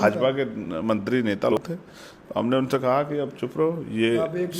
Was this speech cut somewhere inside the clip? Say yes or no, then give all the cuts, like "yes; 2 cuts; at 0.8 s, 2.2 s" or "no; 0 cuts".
yes; 1 cut; at 1.5 s